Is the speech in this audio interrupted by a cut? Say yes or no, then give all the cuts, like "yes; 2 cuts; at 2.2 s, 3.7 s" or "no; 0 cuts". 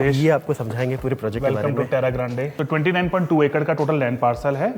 yes; 1 cut; at 2.5 s